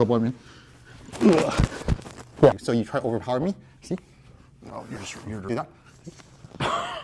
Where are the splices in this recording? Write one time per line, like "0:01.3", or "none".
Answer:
0:02.5
0:05.4

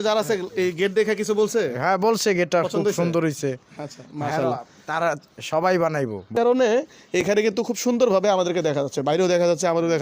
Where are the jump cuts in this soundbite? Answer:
0:06.3

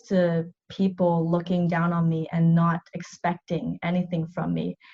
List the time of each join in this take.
none

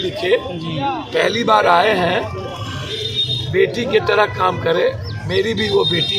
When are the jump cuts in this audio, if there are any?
none

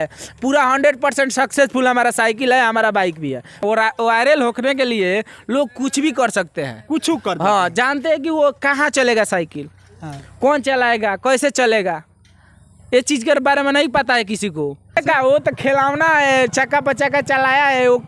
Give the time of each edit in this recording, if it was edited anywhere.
0:03.6
0:15.0

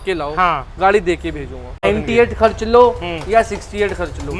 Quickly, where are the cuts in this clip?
0:01.8

